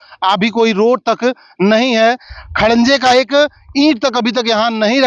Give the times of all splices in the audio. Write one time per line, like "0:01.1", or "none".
none